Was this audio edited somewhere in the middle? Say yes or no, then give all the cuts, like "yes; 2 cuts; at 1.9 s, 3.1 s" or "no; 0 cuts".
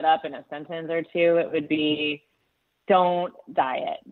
no; 0 cuts